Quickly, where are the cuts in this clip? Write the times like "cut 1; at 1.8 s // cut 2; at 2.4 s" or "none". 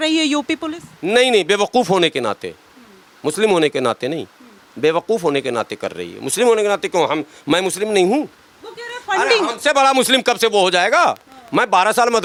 none